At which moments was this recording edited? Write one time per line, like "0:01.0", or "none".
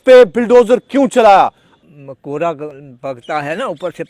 0:01.7